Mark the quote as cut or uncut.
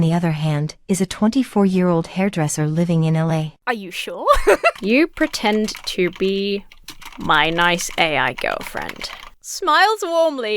cut